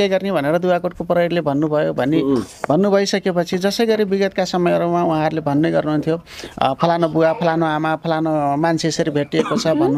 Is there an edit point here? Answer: no; 0 cuts

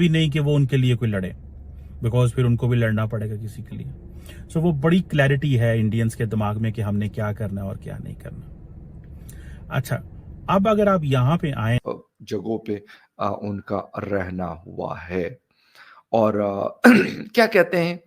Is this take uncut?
no; 1 cut; at 11.8 s

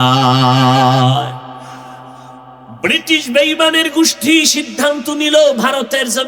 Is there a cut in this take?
yes; 1 cut; at 2.7 s

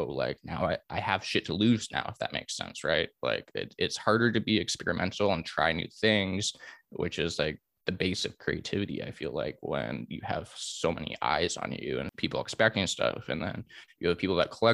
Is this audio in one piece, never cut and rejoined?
no; 1 cut; at 12.1 s

